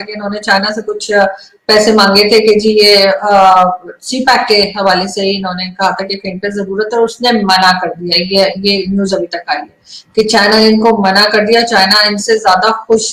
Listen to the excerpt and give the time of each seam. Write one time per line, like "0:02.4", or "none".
none